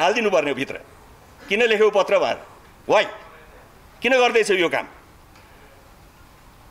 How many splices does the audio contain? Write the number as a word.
zero